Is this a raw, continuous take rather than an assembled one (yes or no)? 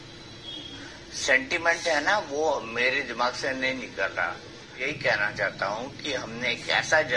no